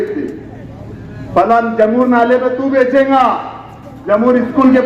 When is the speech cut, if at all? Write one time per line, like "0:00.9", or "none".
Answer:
none